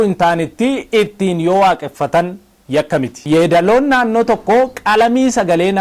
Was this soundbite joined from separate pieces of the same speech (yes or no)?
yes